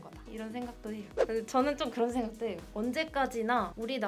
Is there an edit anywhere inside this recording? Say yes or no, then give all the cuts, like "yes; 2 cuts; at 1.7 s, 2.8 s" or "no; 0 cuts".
yes; 1 cut; at 1.1 s